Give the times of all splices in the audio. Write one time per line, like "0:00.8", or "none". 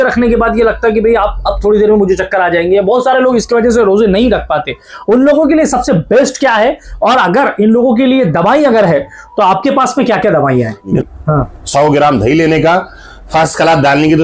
0:11.0